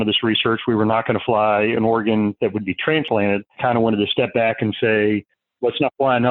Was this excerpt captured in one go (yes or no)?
yes